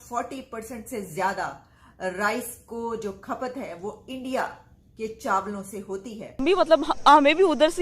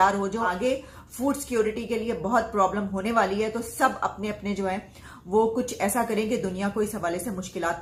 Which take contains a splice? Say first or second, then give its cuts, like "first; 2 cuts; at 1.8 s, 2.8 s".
first; 1 cut; at 6.4 s